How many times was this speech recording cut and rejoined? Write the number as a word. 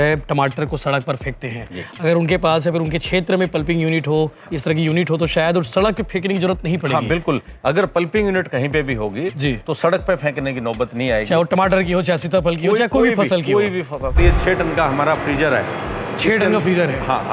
one